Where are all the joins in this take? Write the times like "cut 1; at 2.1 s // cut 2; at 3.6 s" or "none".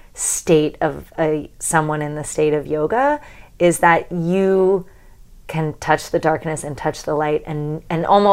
none